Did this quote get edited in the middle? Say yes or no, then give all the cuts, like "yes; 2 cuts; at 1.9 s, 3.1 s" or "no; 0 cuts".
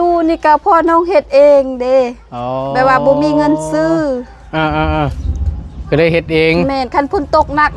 no; 0 cuts